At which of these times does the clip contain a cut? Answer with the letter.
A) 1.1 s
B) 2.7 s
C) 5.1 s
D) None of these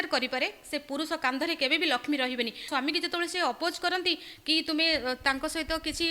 B